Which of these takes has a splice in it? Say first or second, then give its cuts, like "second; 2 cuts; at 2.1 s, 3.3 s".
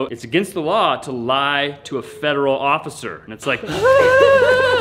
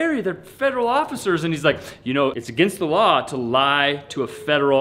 first; 1 cut; at 3.6 s